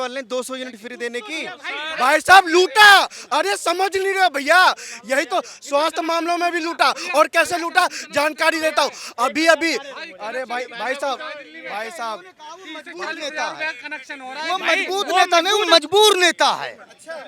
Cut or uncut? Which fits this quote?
uncut